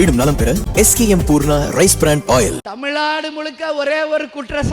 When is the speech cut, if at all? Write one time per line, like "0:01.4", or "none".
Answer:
0:02.7